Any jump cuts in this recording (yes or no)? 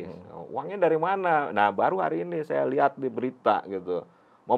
no